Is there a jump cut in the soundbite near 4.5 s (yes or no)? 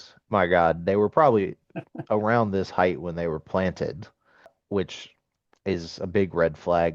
yes